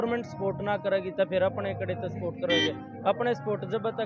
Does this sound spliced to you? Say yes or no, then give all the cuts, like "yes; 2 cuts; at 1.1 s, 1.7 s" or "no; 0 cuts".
no; 0 cuts